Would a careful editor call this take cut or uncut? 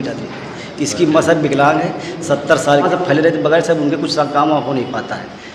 cut